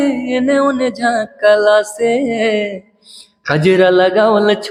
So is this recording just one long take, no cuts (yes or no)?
yes